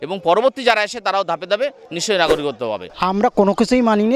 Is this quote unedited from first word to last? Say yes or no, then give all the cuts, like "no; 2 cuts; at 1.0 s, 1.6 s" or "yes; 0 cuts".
no; 1 cut; at 2.9 s